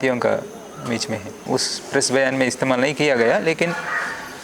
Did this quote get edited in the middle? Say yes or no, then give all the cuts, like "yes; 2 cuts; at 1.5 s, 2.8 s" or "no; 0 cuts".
yes; 1 cut; at 1.3 s